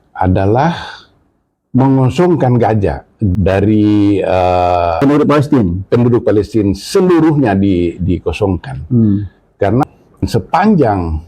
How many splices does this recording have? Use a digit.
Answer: 3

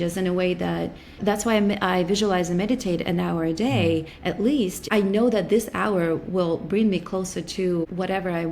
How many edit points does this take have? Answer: 1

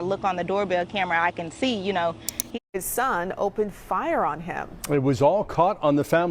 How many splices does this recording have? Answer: 1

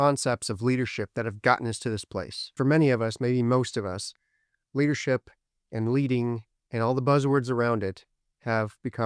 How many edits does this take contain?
1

